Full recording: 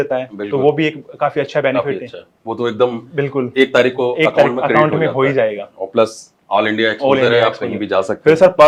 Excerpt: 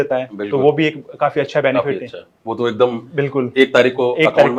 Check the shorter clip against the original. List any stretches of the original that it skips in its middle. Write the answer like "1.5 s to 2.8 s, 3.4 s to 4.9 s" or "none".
none